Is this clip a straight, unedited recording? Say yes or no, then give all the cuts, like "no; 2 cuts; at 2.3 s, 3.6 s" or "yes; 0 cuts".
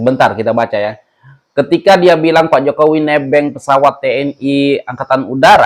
yes; 0 cuts